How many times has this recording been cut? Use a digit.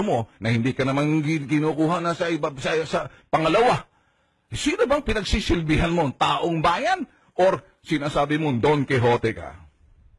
1